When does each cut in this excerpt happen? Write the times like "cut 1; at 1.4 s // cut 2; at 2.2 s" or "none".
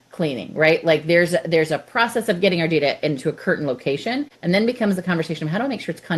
cut 1; at 4.3 s

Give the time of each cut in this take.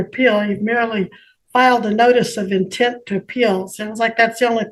none

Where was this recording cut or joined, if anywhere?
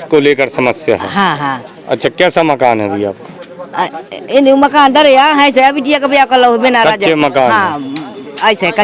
none

